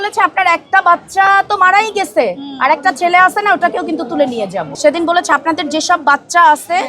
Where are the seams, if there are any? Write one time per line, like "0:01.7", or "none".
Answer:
0:04.8